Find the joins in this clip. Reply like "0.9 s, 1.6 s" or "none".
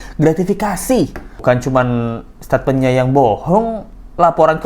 1.3 s